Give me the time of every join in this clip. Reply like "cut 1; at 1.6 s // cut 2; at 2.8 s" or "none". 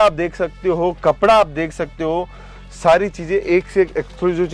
none